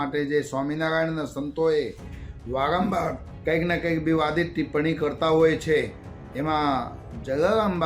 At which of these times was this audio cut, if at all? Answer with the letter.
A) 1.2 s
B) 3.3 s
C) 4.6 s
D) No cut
B